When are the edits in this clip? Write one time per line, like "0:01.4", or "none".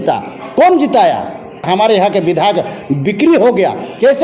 0:01.6